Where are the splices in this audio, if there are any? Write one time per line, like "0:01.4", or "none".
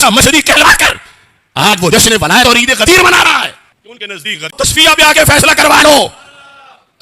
0:04.5